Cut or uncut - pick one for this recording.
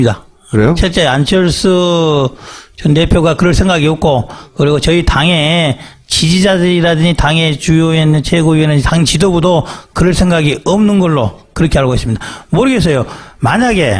uncut